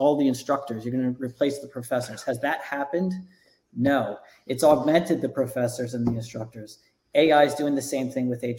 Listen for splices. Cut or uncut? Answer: uncut